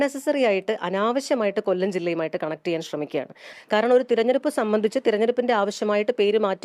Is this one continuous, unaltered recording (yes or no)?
no